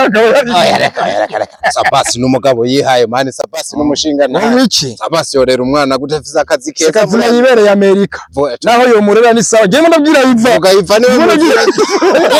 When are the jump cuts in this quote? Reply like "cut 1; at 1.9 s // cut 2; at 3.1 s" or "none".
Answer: none